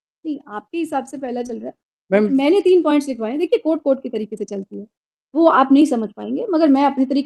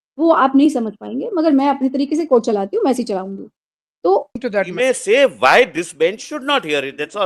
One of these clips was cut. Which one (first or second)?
second